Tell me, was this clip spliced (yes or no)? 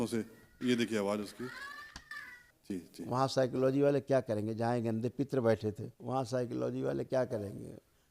yes